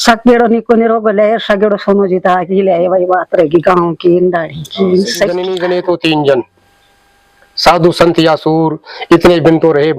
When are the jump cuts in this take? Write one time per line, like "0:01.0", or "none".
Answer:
0:05.5

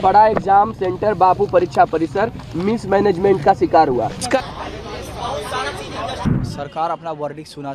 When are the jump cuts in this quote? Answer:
0:04.3
0:06.2

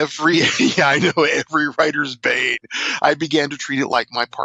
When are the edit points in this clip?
none

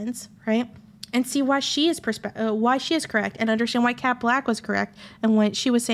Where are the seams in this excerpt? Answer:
none

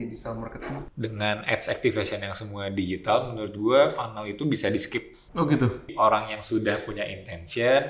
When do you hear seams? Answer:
0:00.9
0:05.9

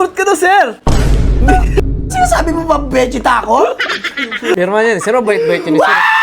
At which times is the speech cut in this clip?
0:04.5

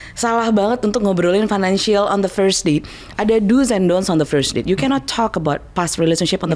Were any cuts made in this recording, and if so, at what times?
none

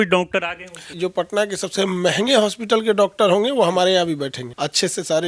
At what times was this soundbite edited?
0:00.9
0:04.4

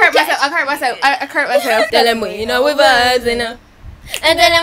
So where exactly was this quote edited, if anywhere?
0:01.9

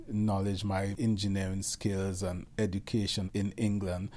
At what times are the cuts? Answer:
0:00.9
0:02.4
0:03.3

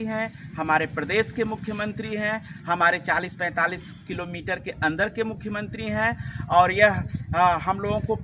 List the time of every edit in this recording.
none

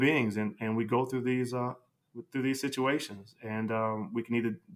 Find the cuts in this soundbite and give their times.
none

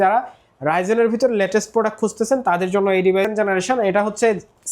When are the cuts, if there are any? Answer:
0:03.3

